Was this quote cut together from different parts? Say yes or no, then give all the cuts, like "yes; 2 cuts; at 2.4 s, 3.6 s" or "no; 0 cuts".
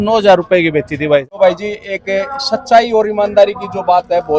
yes; 1 cut; at 1.2 s